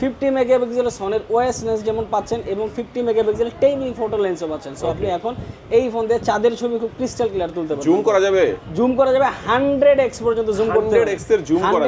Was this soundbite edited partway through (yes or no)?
no